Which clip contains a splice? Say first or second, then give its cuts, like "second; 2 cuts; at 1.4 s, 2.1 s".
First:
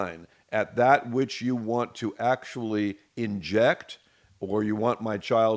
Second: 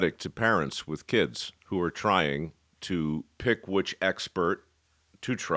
second; 1 cut; at 3.4 s